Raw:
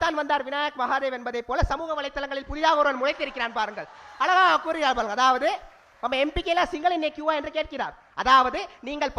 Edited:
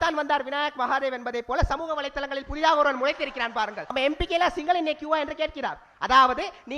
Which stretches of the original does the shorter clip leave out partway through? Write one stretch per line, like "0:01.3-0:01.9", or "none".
0:03.8-0:06.0